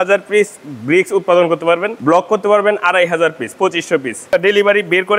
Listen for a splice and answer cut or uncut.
cut